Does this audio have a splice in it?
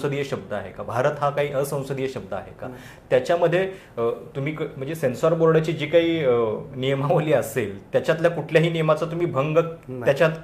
no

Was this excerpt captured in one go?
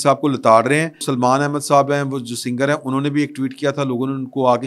no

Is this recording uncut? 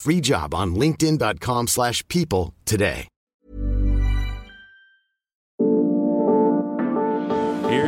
no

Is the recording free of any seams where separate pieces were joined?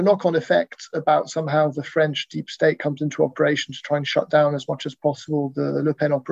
yes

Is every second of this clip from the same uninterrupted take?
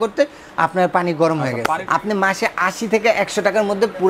no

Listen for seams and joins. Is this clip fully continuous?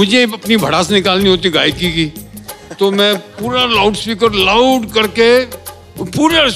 yes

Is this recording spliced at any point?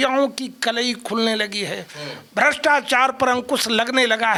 no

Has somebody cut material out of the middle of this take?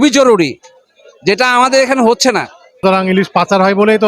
yes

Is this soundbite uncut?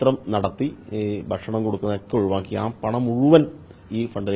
yes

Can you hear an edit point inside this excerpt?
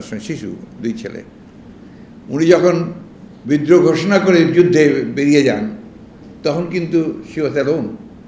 no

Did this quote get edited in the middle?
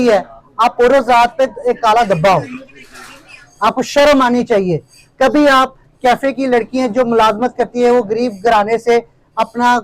no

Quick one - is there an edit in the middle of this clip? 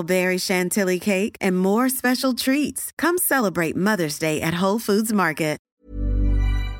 yes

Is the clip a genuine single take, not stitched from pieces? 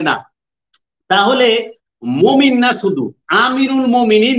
yes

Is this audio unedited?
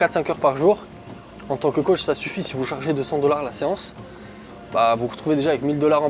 yes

